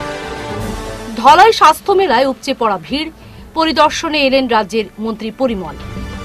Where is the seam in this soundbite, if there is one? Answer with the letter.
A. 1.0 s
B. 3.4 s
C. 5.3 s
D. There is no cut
A